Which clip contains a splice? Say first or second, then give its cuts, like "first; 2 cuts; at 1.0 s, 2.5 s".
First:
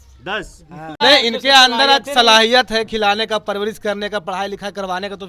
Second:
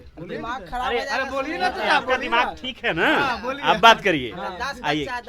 first; 1 cut; at 1.0 s